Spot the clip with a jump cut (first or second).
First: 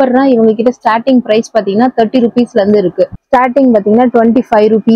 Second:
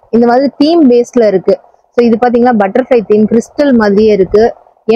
first